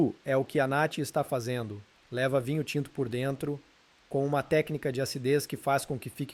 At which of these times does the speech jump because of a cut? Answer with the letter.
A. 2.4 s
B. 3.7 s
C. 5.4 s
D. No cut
D